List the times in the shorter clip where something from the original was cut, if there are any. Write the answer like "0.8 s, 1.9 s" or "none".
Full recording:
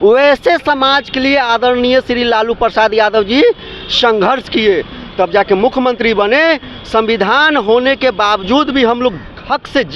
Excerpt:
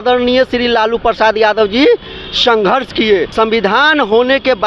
3.3 s